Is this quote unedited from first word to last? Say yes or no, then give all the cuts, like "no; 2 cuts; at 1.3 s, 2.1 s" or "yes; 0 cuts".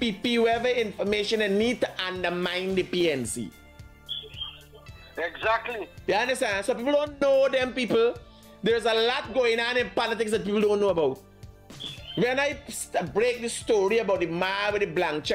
yes; 0 cuts